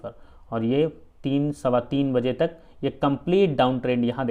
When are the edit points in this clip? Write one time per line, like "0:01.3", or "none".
none